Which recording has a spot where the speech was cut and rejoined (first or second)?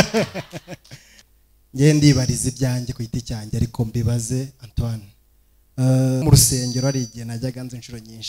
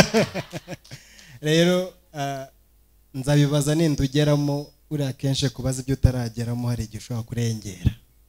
first